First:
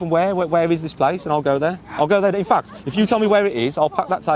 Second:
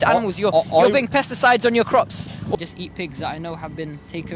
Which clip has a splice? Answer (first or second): second